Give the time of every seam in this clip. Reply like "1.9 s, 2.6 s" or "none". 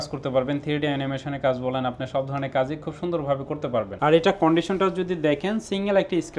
3.9 s